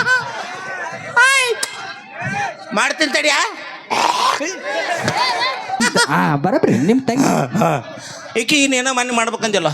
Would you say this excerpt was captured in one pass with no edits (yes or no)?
no